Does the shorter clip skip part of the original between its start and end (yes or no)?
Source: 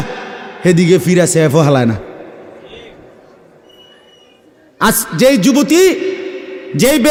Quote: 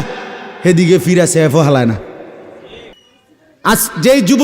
yes